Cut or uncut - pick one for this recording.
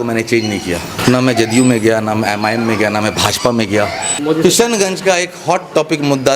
cut